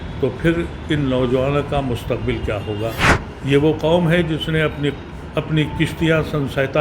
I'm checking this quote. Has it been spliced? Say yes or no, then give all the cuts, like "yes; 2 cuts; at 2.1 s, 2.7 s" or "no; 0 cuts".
yes; 1 cut; at 3.2 s